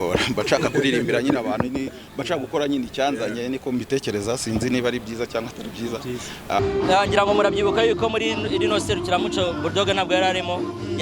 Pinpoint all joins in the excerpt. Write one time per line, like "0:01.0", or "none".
0:06.6